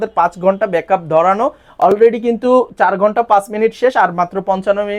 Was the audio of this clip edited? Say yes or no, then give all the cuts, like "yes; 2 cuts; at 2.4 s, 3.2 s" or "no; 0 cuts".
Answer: no; 0 cuts